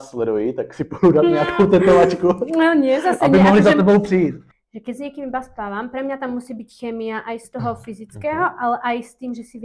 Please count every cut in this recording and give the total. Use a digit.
1